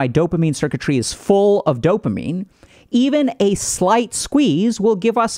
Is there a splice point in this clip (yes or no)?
no